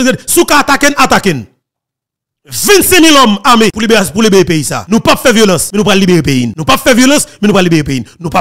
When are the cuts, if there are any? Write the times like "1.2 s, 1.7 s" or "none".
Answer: 3.8 s, 4.8 s, 5.7 s, 6.5 s